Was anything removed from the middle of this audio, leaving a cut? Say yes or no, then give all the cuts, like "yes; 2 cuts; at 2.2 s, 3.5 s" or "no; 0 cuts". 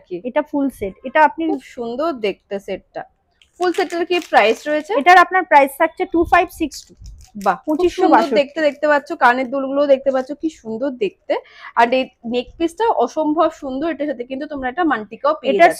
no; 0 cuts